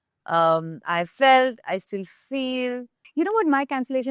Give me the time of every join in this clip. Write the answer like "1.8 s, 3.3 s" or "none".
3.0 s